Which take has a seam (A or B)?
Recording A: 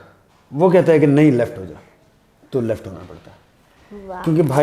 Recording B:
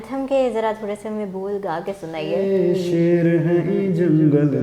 B